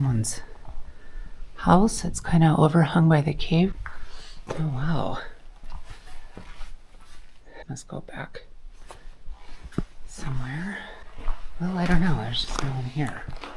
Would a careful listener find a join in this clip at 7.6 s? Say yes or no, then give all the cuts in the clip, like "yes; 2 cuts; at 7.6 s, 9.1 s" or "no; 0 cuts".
yes; 3 cuts; at 3.7 s, 7.6 s, 11.0 s